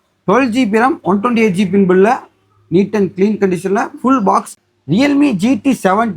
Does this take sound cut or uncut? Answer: cut